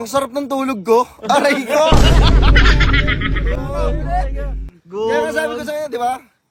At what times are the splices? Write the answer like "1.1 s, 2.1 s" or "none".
none